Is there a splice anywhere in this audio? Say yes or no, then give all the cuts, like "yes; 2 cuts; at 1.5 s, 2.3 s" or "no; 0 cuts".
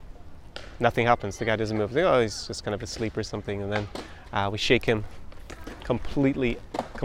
no; 0 cuts